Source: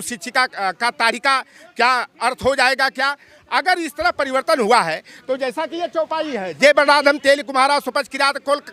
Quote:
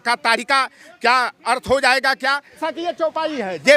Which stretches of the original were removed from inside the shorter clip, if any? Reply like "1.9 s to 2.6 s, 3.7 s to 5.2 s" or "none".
3.4 s to 5.6 s